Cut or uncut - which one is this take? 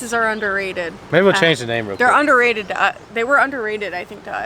cut